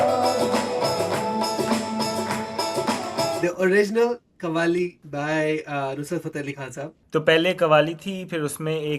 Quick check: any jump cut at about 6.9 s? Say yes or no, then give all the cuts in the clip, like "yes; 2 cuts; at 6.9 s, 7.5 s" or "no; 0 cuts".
yes; 3 cuts; at 3.4 s, 5.0 s, 6.9 s